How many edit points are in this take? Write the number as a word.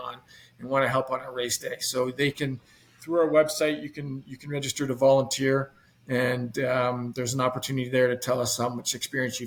zero